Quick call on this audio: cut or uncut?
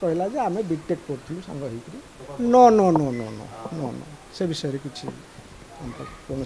cut